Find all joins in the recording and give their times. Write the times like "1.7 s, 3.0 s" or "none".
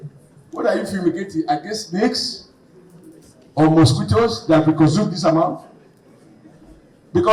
none